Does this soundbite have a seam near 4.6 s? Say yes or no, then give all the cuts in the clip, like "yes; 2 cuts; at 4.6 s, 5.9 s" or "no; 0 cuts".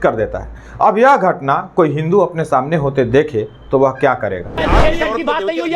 yes; 1 cut; at 4.6 s